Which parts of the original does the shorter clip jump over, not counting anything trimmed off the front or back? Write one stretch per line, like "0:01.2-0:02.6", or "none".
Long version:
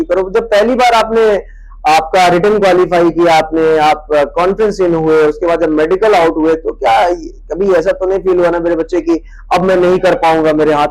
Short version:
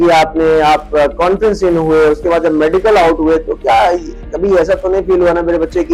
none